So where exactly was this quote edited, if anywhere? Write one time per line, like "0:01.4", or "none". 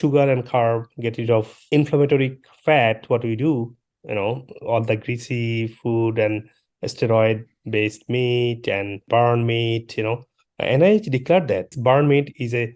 none